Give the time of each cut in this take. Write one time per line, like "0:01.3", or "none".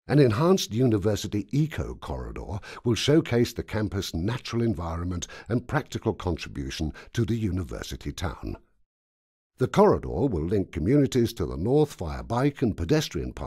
none